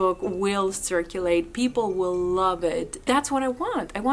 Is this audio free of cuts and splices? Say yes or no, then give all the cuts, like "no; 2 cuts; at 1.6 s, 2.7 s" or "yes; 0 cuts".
no; 1 cut; at 2.9 s